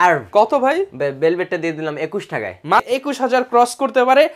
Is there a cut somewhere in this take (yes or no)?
yes